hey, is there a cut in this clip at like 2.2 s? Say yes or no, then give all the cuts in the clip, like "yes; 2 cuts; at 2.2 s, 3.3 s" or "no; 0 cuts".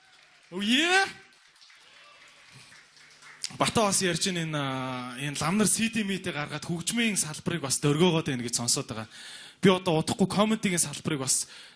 yes; 1 cut; at 2.2 s